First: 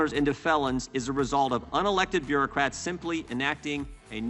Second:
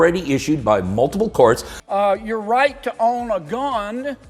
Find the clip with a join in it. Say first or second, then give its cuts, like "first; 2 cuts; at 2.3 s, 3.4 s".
second; 1 cut; at 1.9 s